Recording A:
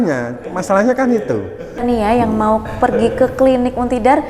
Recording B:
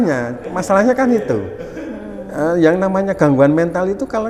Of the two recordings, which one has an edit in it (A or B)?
A